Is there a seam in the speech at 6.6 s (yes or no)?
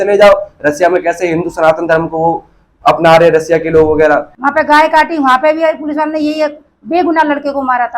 no